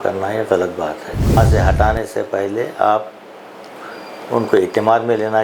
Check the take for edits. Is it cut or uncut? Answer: cut